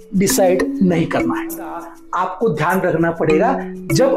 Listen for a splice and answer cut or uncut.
cut